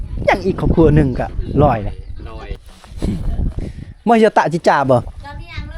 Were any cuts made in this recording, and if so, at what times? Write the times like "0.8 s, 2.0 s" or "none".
2.8 s